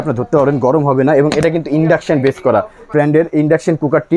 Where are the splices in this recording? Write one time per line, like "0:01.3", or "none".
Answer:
0:02.9